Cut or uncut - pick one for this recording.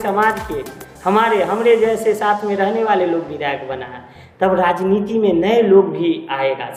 uncut